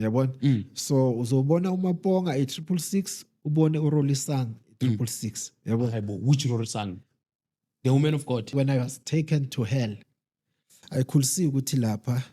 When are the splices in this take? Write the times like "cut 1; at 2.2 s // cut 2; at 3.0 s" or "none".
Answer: cut 1; at 8.5 s